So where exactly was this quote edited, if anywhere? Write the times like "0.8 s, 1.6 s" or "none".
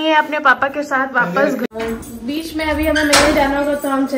1.7 s